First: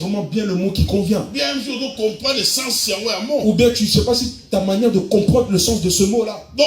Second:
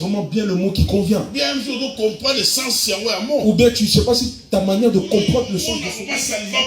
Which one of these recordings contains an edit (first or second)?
second